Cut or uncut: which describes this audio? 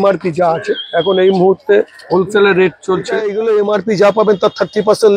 cut